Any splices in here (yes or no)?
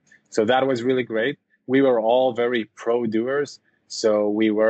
no